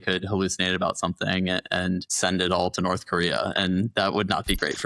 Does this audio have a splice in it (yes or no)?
no